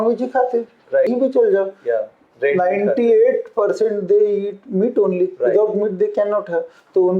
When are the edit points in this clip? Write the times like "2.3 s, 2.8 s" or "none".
1.1 s